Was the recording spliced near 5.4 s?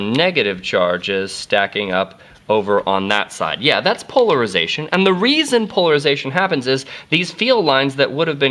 yes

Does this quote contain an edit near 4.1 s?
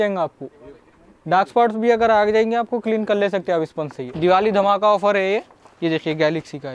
yes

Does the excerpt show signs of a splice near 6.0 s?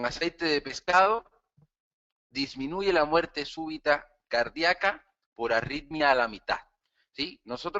no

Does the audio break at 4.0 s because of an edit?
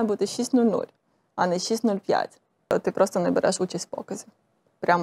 no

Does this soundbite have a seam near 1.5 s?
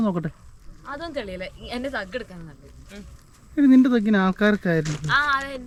no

